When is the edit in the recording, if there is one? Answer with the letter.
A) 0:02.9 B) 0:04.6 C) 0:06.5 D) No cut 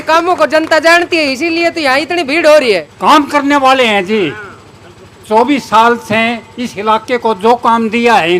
A